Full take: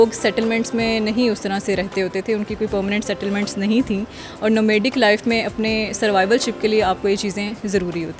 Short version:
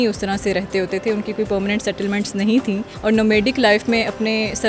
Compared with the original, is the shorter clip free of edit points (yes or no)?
no